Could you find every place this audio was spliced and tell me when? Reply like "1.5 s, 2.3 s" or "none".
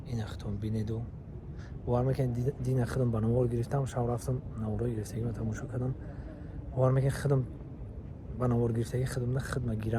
none